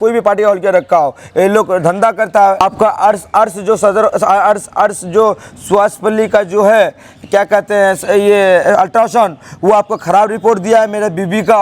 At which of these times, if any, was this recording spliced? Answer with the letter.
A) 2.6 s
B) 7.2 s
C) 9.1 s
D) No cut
A